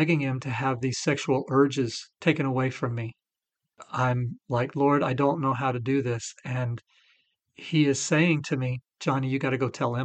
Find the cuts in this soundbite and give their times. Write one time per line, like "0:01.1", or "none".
0:02.0
0:03.8

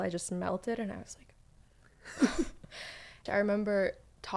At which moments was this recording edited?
0:03.2

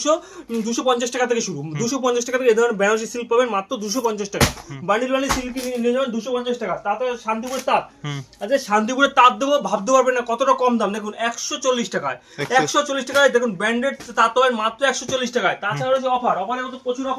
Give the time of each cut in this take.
none

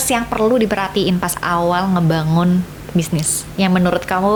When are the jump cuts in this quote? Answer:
none

